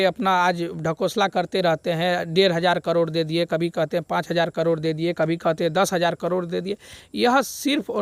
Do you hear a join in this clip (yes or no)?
no